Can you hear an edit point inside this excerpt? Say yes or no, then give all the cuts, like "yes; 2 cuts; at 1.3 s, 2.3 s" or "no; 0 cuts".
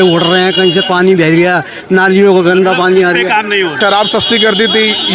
yes; 1 cut; at 3.8 s